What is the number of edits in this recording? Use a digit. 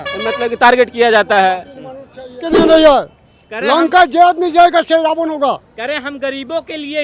1